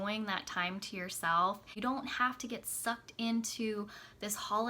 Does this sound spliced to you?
yes; 1 cut; at 1.7 s

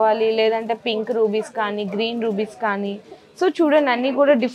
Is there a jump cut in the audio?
no; 0 cuts

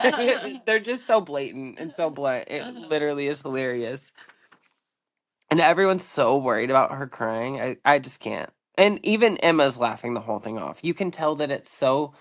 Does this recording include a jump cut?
no; 0 cuts

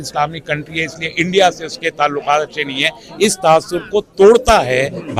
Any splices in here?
no; 0 cuts

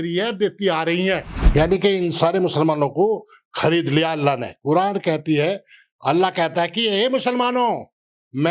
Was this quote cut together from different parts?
yes; 1 cut; at 1.4 s

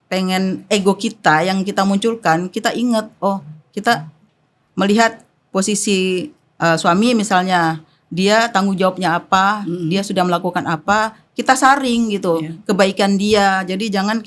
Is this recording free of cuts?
yes; 0 cuts

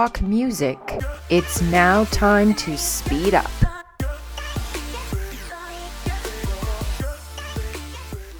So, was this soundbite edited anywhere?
no; 0 cuts

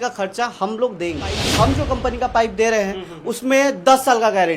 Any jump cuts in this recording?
yes; 1 cut; at 1.7 s

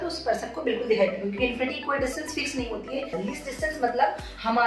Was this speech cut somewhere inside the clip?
yes; 1 cut; at 3.1 s

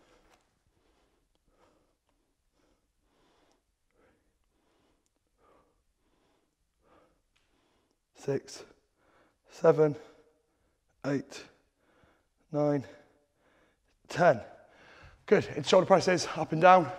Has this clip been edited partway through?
no; 0 cuts

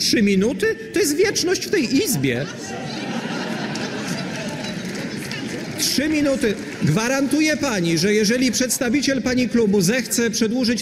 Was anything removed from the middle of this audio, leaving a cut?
no; 0 cuts

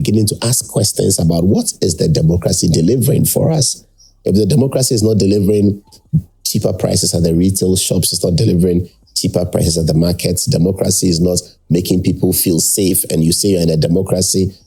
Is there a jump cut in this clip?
no; 0 cuts

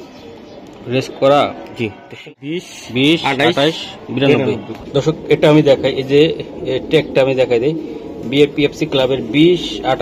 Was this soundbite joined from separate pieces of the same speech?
yes; 1 cut; at 2.0 s

